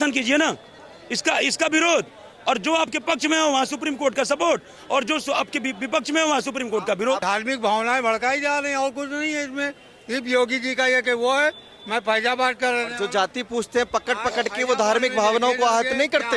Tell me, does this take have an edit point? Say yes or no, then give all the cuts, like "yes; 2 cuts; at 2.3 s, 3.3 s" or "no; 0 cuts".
yes; 1 cut; at 7.2 s